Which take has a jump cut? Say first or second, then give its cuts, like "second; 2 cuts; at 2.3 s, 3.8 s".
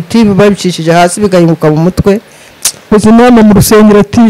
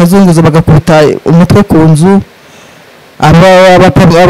first; 1 cut; at 2.9 s